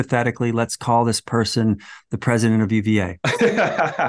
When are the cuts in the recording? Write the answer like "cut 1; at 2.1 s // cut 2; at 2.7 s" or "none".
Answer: cut 1; at 3.2 s

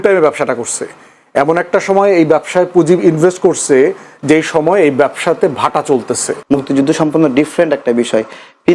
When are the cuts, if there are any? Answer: cut 1; at 6.3 s

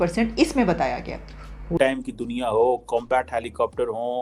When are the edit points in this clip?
cut 1; at 1.8 s

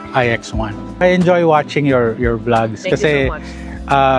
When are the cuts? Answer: cut 1; at 1.0 s

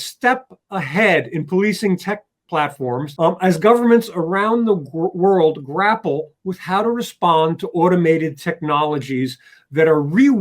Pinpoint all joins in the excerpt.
cut 1; at 3.1 s

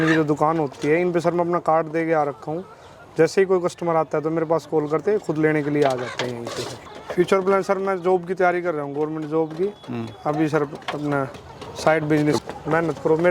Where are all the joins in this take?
cut 1; at 6.8 s // cut 2; at 12.4 s

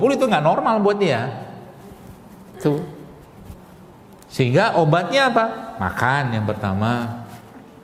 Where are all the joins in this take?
none

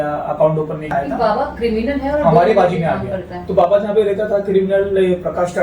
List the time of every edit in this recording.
cut 1; at 0.9 s

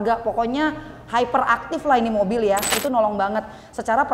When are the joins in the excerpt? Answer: cut 1; at 2.7 s

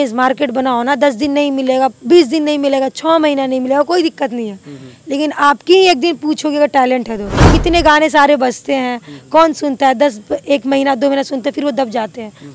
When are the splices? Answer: cut 1; at 7.4 s

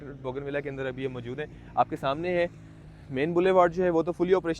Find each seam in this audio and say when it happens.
none

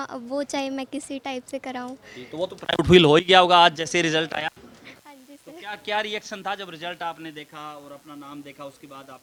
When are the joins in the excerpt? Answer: none

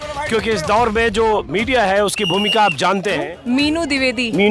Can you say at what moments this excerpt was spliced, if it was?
cut 1; at 3.3 s

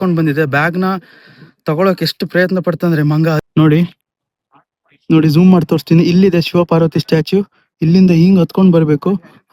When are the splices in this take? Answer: cut 1; at 3.4 s

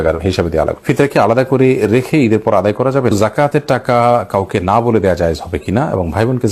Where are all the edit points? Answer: cut 1; at 0.8 s // cut 2; at 3.1 s

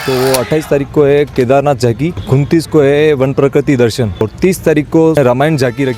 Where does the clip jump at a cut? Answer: cut 1; at 2.2 s // cut 2; at 4.2 s // cut 3; at 5.1 s

